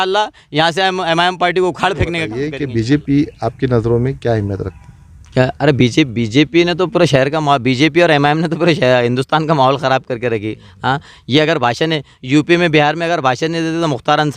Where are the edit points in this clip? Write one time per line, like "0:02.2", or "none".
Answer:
0:02.5